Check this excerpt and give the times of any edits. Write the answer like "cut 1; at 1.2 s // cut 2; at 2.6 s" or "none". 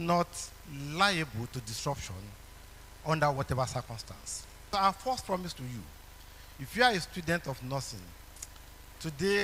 cut 1; at 4.5 s